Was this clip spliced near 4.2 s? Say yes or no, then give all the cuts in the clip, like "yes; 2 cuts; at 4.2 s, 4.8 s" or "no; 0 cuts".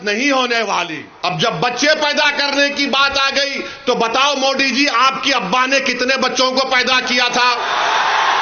no; 1 cut; at 1.0 s